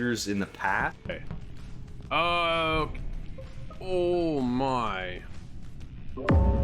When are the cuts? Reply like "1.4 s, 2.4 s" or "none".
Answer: 0.9 s